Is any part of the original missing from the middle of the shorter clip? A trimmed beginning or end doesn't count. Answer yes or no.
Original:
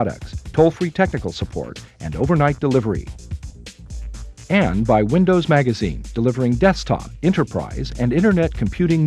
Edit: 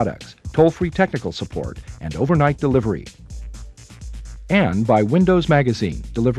no